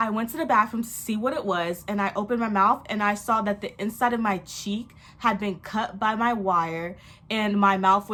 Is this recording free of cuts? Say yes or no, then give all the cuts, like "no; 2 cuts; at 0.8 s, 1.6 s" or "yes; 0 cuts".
yes; 0 cuts